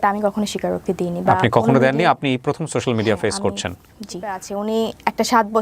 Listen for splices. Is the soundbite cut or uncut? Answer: cut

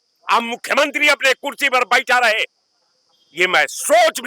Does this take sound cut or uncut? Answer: uncut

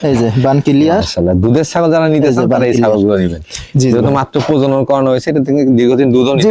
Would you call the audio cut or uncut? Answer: uncut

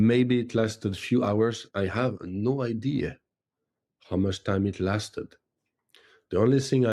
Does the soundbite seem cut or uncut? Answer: uncut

